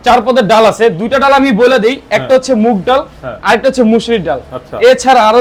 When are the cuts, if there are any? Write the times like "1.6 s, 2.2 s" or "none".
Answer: none